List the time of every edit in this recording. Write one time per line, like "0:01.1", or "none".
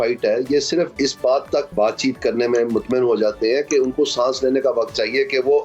0:00.9
0:01.7

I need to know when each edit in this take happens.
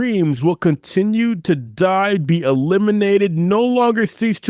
none

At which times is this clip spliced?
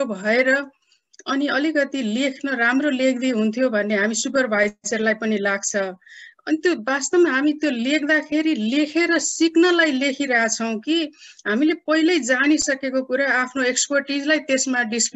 none

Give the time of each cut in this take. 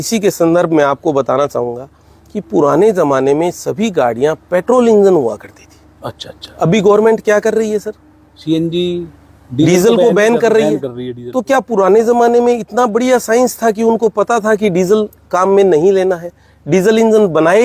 none

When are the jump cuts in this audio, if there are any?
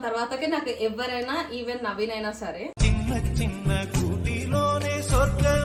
none

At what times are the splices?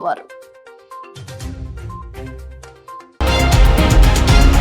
0:03.1

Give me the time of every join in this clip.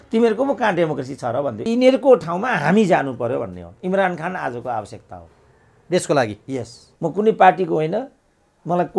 0:01.6
0:06.8

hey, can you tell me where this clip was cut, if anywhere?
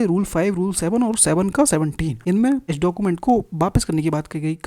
0:02.2
0:02.7

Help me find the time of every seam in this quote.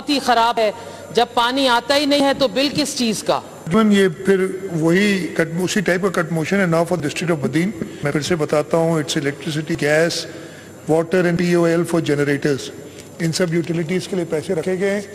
0:03.7
0:07.9

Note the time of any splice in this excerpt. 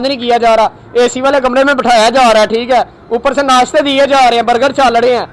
none

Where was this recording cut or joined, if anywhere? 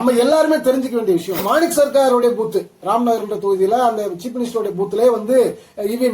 0:01.4

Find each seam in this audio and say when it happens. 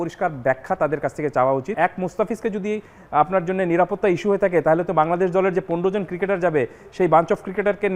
0:01.7

